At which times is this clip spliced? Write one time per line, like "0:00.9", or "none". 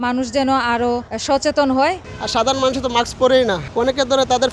0:01.1
0:02.1
0:03.6